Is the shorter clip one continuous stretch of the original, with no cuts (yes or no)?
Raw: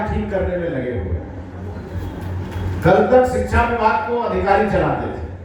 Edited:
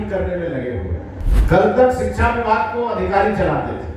no